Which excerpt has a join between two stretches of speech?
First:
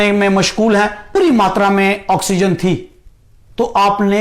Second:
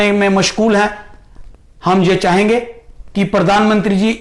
first; 1 cut; at 1.1 s

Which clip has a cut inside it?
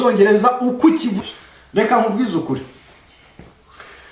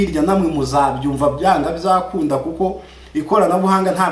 first; 1 cut; at 1.2 s

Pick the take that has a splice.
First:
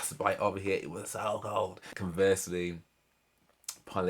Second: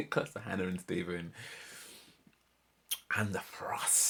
first; 1 cut; at 1.9 s

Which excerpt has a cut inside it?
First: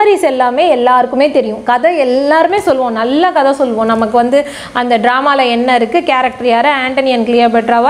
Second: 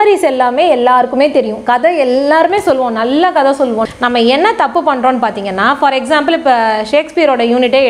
second; 1 cut; at 3.8 s

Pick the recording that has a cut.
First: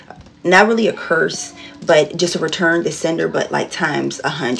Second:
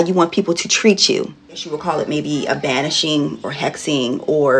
second; 1 cut; at 1.7 s

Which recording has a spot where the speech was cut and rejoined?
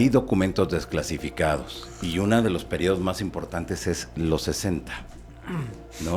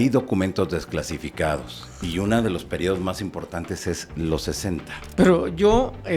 second; 1 cut; at 5.0 s

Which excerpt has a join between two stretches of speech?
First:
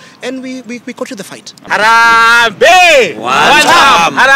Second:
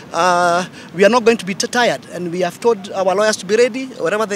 first; 1 cut; at 1.6 s

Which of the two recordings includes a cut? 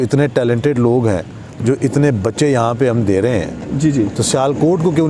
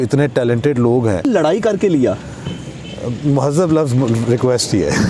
second; 1 cut; at 1.2 s

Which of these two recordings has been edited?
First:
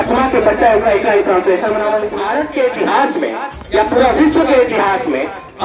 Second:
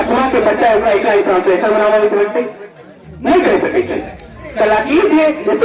first; 1 cut; at 2.1 s

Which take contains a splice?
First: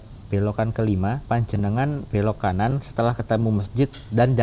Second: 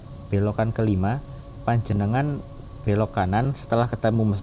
first; 2 cuts; at 1.2 s, 2.0 s

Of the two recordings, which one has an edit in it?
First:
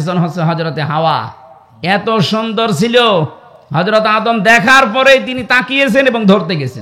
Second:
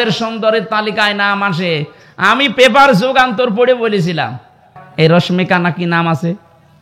second; 1 cut; at 4.8 s

